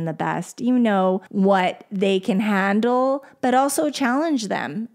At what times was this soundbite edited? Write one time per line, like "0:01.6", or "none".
0:01.3